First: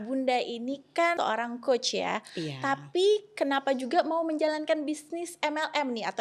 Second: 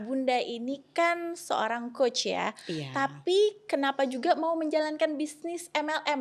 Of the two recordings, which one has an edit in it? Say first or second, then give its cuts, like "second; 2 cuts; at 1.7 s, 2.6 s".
first; 1 cut; at 1.2 s